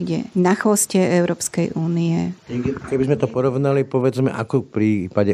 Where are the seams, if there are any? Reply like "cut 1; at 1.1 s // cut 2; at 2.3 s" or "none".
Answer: none